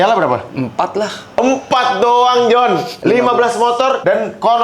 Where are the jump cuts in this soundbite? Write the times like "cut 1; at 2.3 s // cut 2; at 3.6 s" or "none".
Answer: cut 1; at 2.9 s